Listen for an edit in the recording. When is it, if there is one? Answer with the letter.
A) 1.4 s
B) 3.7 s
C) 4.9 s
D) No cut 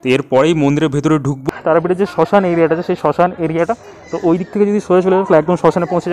A